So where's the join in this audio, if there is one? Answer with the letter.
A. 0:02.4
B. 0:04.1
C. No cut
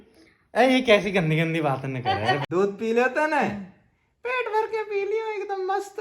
A